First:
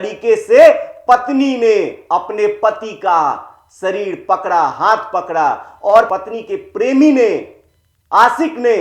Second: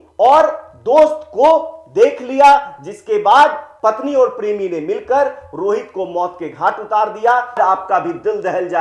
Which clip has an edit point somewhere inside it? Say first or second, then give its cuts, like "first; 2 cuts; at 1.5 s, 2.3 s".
second; 1 cut; at 7.6 s